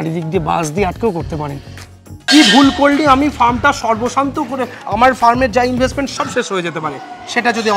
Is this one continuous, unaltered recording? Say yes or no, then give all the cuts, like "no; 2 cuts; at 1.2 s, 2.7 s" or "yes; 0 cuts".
no; 1 cut; at 1.8 s